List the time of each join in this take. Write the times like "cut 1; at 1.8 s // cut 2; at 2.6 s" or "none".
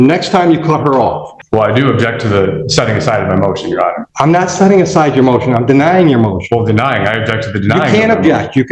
cut 1; at 1.3 s // cut 2; at 4.1 s